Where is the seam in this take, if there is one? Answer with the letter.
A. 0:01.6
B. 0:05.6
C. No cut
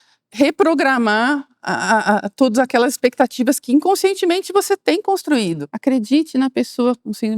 B